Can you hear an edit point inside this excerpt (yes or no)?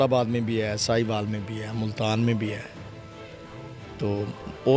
no